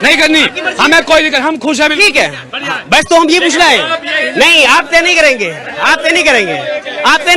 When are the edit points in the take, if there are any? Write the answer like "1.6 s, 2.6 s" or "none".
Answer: none